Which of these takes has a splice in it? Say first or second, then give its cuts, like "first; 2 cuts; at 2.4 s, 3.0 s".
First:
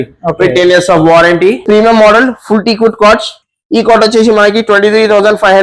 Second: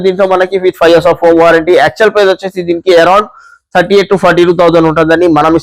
first; 1 cut; at 1.6 s